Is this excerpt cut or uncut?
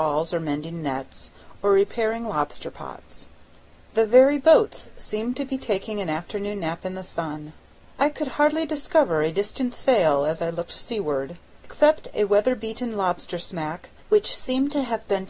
cut